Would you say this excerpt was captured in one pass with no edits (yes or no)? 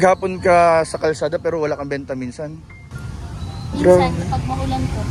yes